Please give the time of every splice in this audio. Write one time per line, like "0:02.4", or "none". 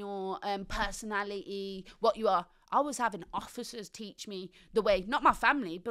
none